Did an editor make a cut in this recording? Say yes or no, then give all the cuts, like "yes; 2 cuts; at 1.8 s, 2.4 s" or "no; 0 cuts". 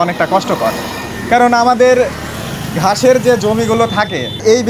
no; 0 cuts